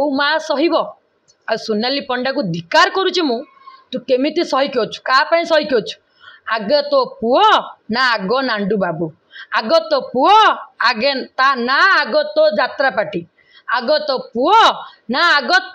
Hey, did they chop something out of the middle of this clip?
no; 0 cuts

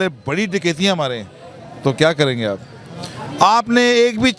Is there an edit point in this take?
no; 0 cuts

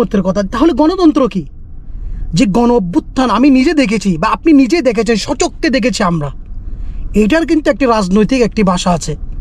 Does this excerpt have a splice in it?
no; 0 cuts

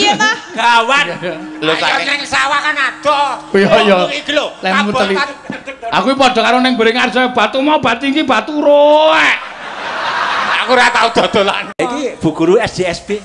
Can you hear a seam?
yes; 1 cut; at 11.7 s

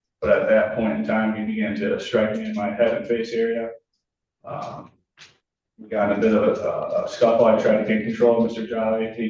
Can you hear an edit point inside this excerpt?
yes; 1 cut; at 1.5 s

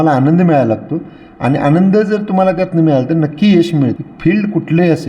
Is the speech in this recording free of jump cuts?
no; 1 cut; at 3.9 s

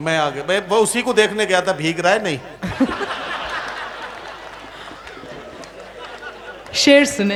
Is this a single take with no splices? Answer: yes; 0 cuts

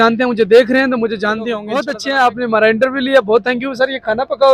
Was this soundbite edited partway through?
yes; 1 cut; at 1.9 s

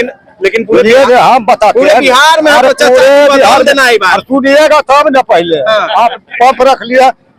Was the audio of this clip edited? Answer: no; 0 cuts

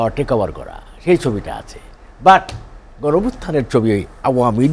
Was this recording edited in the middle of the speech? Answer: no; 0 cuts

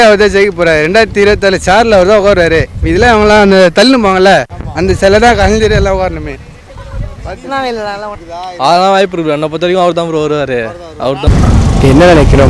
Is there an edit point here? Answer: yes; 2 cuts; at 8.2 s, 11.2 s

